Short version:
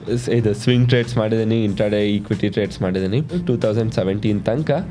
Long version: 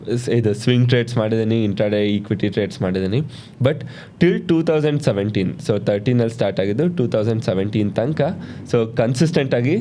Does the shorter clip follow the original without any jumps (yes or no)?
no